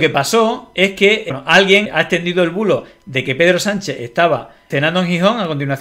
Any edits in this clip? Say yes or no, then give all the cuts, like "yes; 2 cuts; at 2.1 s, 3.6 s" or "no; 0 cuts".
yes; 1 cut; at 1.9 s